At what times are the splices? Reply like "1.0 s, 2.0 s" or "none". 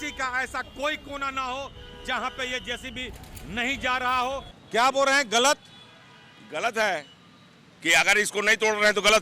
4.5 s

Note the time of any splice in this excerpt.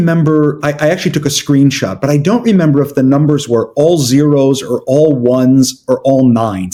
none

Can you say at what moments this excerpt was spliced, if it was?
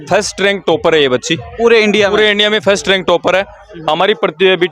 none

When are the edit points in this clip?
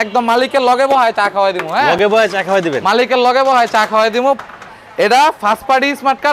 none

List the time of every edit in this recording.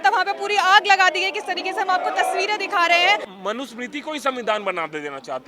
3.3 s

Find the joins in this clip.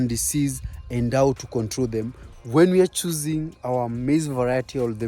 2.3 s

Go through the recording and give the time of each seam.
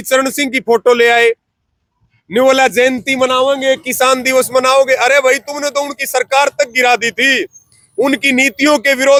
none

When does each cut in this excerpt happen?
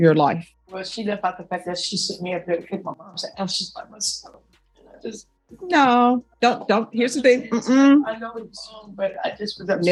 none

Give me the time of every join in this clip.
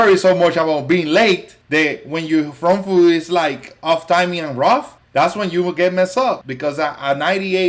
1.5 s, 5.0 s, 6.5 s

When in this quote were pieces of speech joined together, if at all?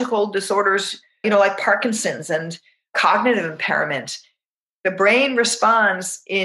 none

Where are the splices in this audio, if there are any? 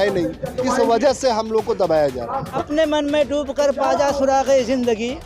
2.5 s

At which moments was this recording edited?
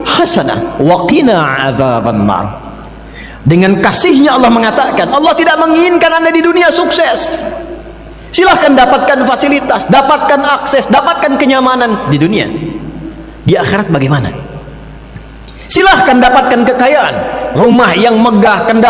none

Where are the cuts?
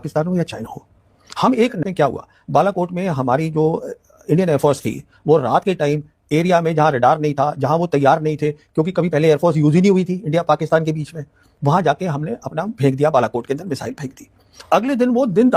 1.8 s

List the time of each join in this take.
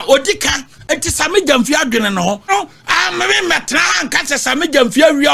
2.5 s

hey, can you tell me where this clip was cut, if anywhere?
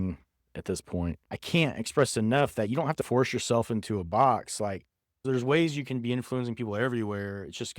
1.3 s

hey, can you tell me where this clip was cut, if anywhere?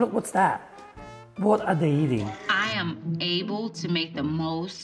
2.3 s

